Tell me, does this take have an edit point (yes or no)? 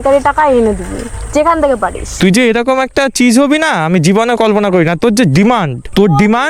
yes